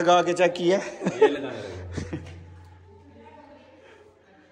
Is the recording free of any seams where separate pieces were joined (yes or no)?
yes